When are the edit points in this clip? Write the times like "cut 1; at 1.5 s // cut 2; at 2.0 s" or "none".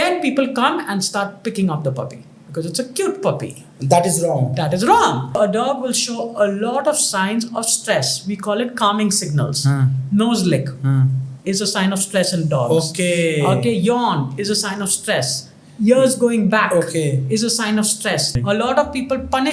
cut 1; at 5.4 s // cut 2; at 18.3 s